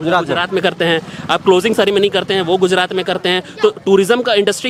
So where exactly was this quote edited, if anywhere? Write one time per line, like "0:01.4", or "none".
none